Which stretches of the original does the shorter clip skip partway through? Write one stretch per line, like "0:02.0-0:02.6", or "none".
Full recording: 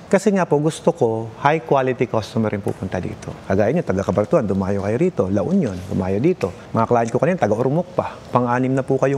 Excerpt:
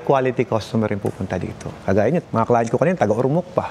0:03.9-0:06.7